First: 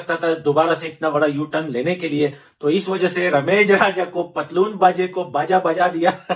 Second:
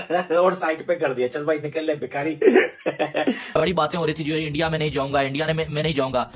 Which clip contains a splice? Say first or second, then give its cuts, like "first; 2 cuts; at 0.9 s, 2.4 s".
second; 1 cut; at 3.5 s